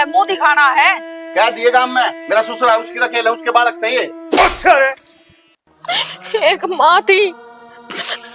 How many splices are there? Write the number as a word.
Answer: one